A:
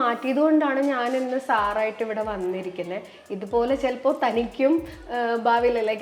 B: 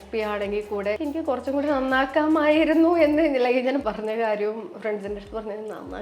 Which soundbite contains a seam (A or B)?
B